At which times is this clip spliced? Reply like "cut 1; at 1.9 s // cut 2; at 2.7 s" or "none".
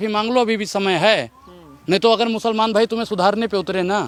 none